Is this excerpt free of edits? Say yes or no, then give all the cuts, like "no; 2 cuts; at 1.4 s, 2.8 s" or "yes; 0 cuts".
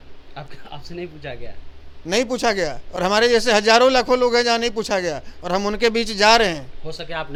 yes; 0 cuts